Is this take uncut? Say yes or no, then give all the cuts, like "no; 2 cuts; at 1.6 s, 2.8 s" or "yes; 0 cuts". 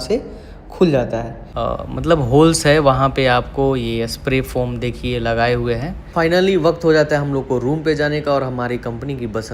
no; 2 cuts; at 1.4 s, 6.1 s